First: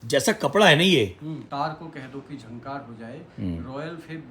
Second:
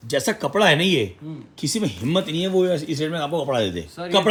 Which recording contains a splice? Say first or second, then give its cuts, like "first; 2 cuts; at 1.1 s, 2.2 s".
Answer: first; 1 cut; at 1.5 s